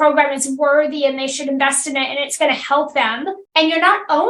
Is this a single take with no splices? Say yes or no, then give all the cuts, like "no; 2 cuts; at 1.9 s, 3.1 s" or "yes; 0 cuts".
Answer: no; 1 cut; at 3.4 s